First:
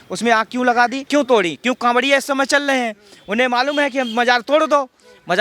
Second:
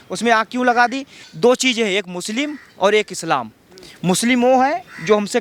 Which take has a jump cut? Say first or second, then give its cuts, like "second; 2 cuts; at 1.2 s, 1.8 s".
first; 1 cut; at 1.0 s